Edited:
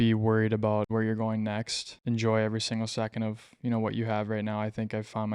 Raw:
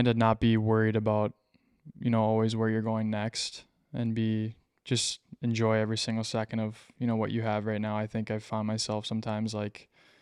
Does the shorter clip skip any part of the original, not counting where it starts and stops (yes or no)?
yes